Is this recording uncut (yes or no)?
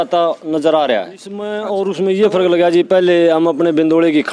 no